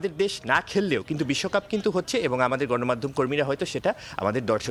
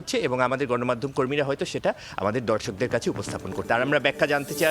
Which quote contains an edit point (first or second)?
second